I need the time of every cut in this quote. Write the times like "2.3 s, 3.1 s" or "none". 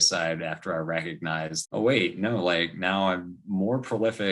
none

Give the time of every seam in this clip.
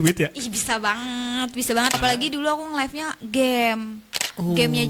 1.9 s

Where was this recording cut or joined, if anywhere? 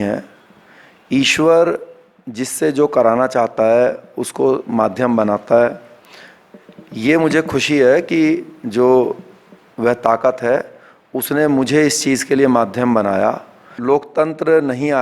13.7 s

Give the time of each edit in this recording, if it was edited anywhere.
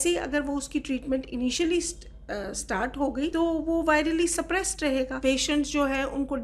3.3 s, 5.1 s

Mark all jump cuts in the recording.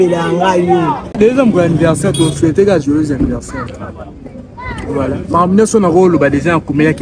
1.1 s

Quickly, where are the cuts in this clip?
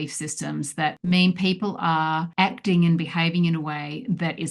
1.0 s, 2.3 s

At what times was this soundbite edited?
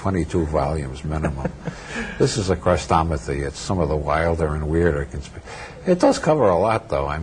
none

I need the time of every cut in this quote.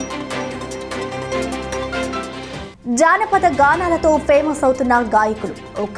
2.4 s

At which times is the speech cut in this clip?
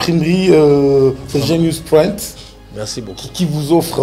none

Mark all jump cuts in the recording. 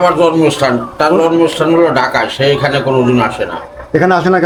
none

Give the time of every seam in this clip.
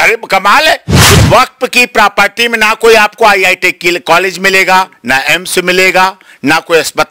1.2 s

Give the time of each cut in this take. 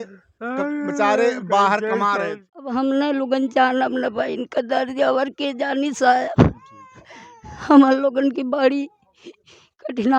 2.4 s

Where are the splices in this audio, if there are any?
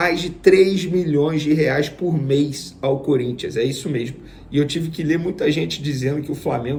none

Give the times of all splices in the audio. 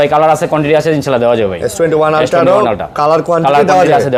none

